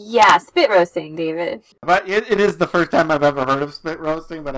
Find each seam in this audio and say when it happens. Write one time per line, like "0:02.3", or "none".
0:01.7